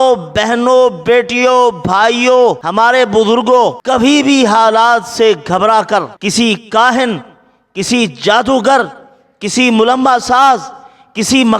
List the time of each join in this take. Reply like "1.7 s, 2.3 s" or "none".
2.6 s, 3.8 s, 6.1 s